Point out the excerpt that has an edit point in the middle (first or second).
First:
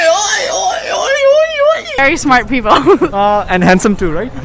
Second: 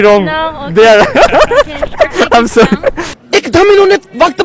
first